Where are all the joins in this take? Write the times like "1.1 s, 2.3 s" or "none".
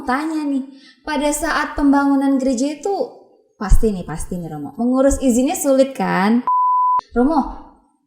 6.7 s